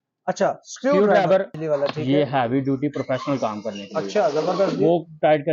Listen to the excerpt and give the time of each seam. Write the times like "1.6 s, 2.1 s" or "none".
1.5 s